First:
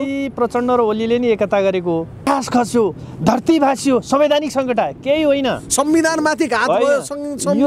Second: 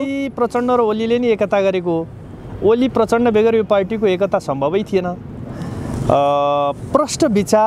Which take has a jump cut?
first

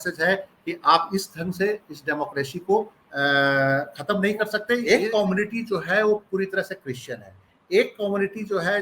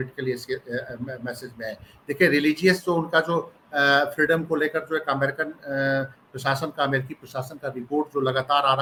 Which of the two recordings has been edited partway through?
first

